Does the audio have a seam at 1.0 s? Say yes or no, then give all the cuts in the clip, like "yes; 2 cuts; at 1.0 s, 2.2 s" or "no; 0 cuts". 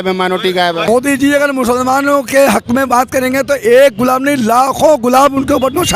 yes; 1 cut; at 1.0 s